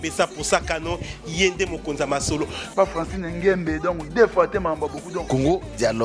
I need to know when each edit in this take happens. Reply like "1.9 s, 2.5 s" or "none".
none